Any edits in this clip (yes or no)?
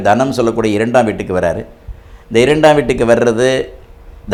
no